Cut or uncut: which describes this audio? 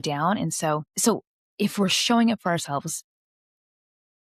cut